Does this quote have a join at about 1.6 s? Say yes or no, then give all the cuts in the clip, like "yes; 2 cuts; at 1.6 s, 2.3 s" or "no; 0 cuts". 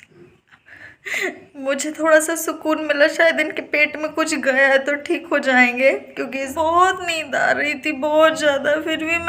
no; 1 cut; at 6.5 s